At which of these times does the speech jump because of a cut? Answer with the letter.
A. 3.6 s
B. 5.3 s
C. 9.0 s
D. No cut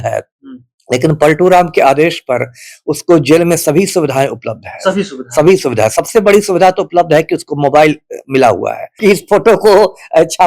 C